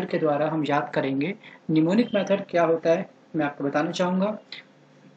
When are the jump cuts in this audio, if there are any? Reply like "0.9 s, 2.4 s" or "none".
4.0 s